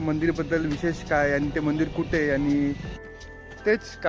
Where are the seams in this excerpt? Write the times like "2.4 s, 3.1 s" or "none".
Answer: 2.9 s